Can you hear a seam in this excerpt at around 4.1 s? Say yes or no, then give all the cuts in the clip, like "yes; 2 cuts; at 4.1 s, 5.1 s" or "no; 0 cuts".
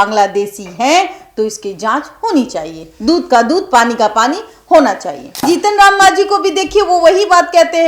no; 1 cut; at 5.4 s